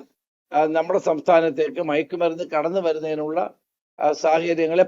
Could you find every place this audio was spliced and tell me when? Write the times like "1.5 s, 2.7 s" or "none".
none